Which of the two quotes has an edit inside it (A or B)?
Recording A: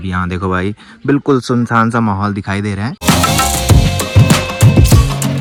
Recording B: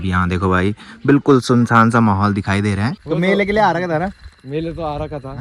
B